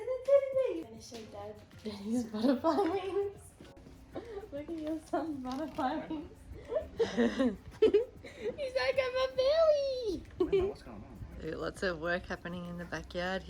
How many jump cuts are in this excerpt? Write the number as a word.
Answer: two